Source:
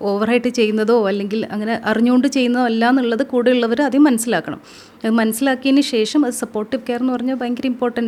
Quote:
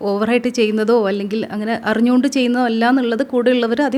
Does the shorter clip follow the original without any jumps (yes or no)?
yes